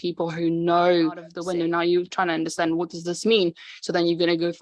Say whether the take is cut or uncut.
cut